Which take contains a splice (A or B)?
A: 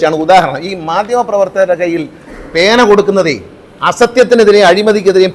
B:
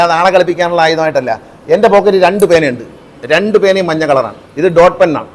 B